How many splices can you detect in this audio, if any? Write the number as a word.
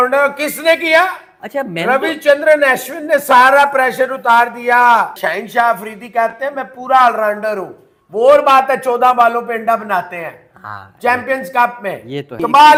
zero